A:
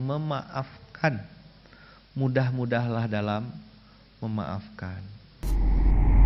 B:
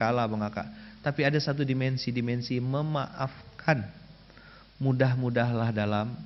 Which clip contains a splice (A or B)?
A